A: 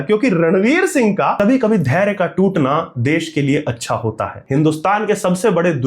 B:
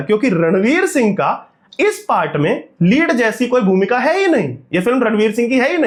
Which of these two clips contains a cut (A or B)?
A